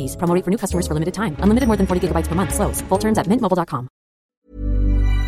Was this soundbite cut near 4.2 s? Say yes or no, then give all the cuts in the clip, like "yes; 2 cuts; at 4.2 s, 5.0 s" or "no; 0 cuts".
yes; 1 cut; at 4.2 s